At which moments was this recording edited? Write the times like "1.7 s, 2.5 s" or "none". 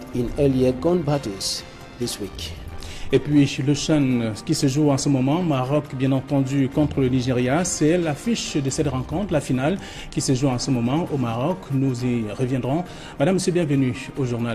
none